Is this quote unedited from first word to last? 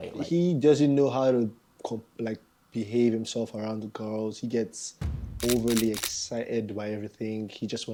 yes; 0 cuts

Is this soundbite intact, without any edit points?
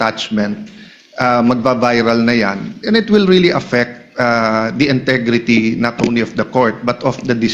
yes; 0 cuts

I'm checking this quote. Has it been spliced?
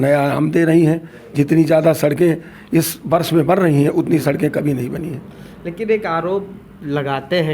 no; 0 cuts

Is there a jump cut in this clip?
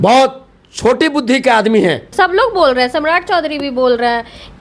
yes; 1 cut; at 2.1 s

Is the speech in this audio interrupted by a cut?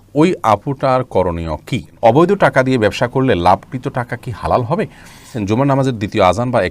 yes; 2 cuts; at 1.9 s, 5.3 s

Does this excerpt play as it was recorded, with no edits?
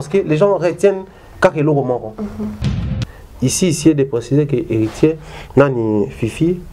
no; 1 cut; at 2.7 s

